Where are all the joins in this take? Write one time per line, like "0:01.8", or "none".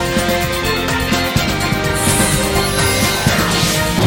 none